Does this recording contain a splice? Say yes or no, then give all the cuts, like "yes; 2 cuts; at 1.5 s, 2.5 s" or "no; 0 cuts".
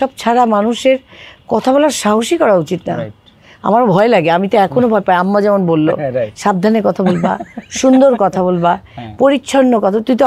no; 0 cuts